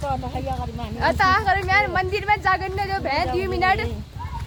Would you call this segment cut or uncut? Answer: uncut